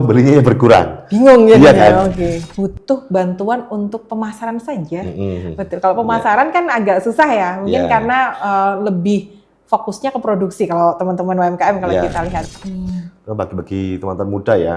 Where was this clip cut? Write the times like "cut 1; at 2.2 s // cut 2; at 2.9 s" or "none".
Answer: cut 1; at 2.5 s // cut 2; at 12.5 s